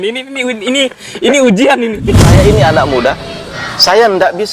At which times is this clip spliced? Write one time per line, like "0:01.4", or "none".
0:02.2